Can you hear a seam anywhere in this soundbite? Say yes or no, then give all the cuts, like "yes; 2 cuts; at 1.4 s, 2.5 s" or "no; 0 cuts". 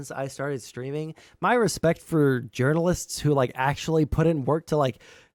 no; 0 cuts